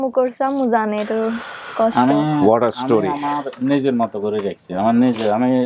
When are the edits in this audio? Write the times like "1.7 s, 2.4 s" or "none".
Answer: none